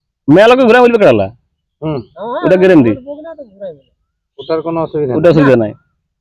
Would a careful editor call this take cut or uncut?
uncut